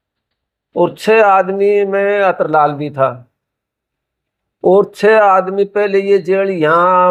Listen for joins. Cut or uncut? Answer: uncut